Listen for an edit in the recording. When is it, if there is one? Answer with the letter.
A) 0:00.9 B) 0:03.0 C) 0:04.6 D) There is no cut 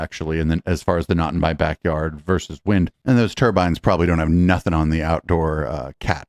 B